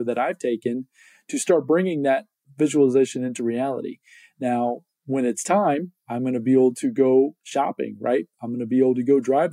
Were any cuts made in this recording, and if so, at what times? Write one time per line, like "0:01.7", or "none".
0:02.4